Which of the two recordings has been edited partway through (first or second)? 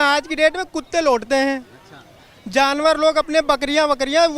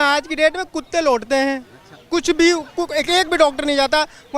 second